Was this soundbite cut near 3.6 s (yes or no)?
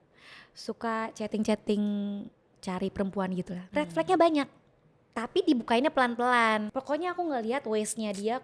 yes